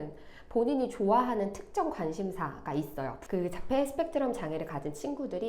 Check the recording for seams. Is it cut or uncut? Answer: cut